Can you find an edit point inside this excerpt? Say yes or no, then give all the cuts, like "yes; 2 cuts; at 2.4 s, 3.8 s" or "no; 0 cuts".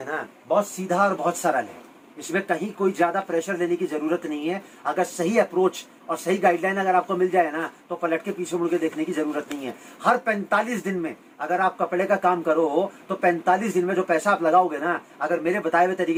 no; 0 cuts